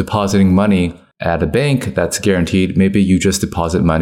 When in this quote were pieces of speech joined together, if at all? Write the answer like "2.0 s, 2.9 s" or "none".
none

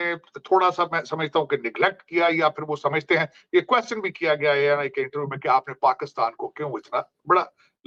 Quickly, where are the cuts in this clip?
none

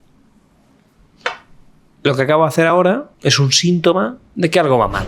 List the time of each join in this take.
3.1 s, 4.2 s

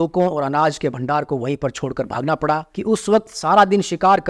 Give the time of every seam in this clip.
2.7 s

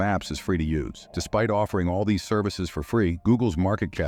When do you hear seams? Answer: none

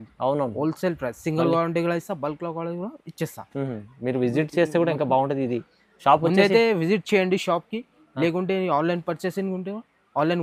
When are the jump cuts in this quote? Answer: none

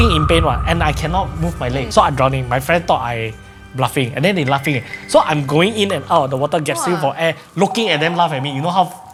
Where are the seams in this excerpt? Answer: none

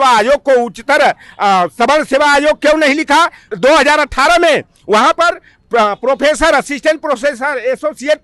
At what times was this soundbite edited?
3.4 s

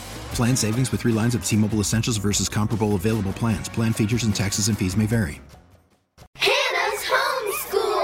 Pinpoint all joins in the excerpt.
6.4 s

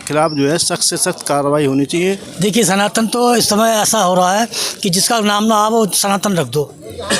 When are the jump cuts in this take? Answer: 2.3 s

